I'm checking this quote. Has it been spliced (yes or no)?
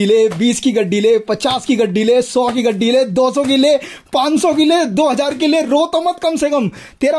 no